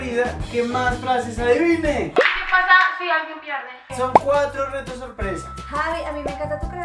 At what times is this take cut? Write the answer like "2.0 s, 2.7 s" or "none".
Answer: 2.1 s, 3.9 s

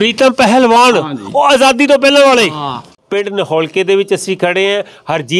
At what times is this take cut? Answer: 2.9 s

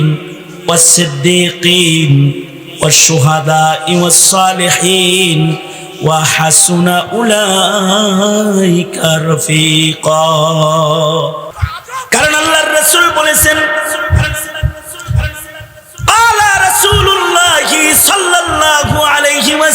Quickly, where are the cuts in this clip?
11.5 s

